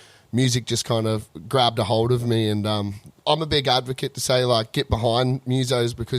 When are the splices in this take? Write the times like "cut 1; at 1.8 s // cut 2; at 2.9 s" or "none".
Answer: cut 1; at 3.1 s